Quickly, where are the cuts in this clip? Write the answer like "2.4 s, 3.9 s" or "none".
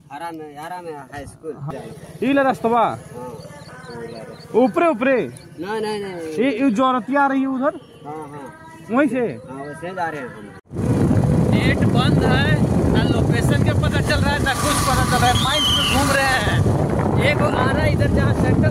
1.7 s, 10.7 s